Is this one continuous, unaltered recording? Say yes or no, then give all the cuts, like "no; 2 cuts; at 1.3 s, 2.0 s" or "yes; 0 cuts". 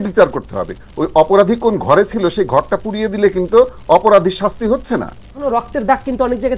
no; 1 cut; at 5.4 s